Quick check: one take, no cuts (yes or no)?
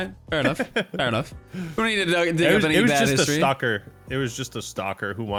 yes